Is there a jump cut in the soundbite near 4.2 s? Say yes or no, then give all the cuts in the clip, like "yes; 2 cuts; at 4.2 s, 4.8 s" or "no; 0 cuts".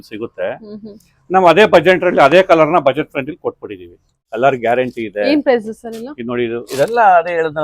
yes; 1 cut; at 4.2 s